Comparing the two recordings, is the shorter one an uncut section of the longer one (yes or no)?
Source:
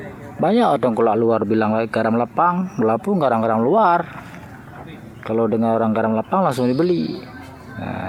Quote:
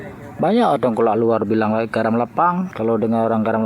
no